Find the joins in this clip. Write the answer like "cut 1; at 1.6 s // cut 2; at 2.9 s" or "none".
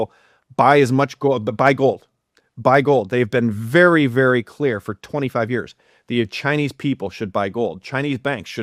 none